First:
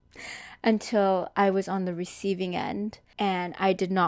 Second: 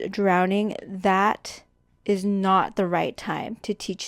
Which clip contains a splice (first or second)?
first